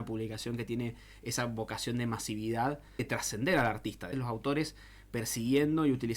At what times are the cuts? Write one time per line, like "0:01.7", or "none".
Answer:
0:03.1
0:04.1

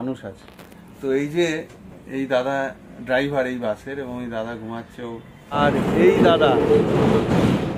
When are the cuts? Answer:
0:05.6

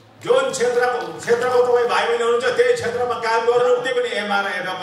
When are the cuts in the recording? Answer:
0:03.9

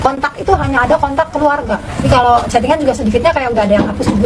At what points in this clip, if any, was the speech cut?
0:02.1

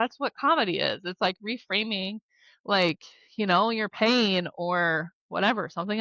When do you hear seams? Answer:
none

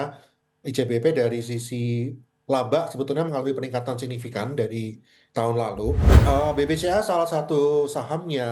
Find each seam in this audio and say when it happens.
0:06.1

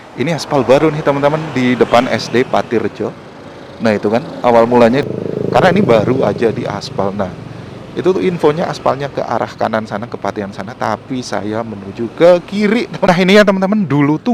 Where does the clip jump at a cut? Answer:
0:05.0
0:13.1

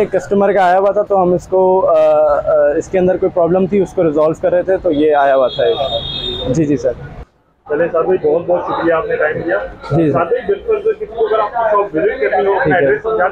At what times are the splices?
none

